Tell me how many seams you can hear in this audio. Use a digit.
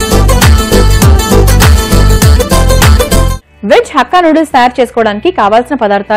1